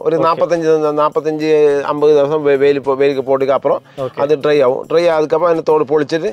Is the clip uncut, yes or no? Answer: yes